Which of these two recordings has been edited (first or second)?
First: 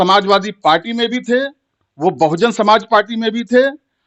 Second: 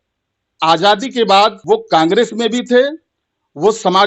second